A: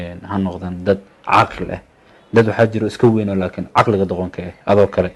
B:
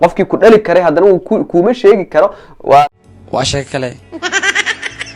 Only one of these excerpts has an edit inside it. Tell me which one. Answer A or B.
B